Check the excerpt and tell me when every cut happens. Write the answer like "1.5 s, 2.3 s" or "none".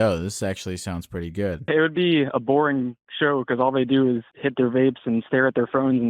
1.6 s, 4.3 s